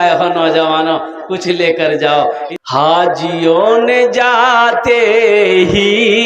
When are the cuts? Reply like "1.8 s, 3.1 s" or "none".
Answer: 2.4 s